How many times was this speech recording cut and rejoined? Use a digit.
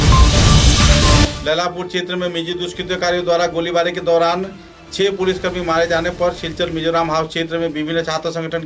1